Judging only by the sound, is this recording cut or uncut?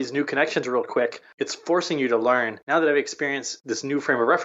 cut